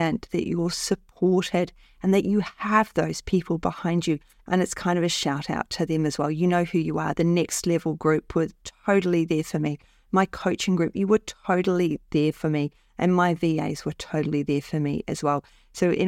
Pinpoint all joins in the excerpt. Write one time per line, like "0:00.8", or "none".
0:04.3